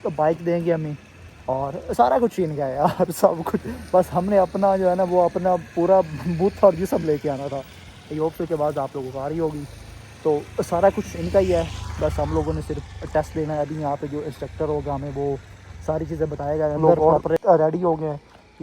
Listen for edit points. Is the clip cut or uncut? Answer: cut